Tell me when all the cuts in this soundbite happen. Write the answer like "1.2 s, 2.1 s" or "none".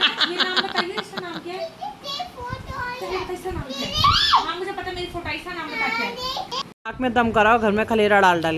6.6 s